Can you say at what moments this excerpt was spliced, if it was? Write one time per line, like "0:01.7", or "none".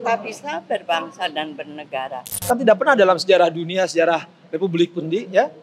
0:02.3